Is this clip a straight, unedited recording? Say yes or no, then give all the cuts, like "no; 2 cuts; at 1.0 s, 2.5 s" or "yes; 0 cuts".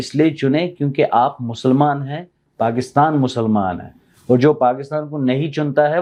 yes; 0 cuts